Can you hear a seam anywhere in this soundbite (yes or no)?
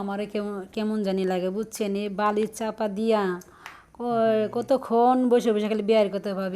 no